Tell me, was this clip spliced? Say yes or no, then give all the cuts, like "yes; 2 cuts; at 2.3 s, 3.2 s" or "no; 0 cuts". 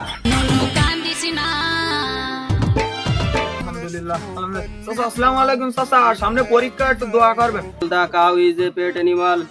yes; 2 cuts; at 3.6 s, 7.8 s